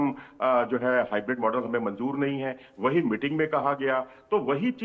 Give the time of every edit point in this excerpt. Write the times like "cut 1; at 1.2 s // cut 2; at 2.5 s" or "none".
none